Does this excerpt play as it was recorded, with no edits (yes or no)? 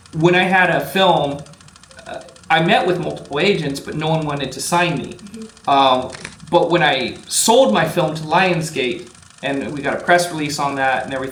yes